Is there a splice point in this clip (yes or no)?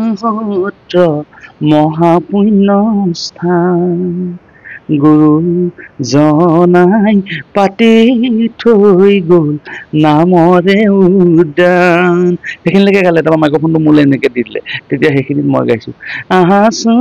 no